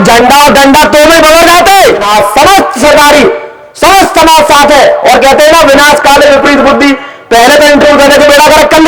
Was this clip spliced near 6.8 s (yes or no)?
no